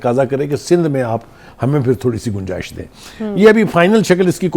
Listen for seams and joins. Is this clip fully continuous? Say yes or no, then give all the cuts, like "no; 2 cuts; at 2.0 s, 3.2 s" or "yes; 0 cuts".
yes; 0 cuts